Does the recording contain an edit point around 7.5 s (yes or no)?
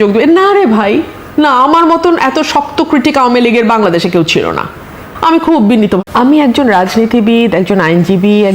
no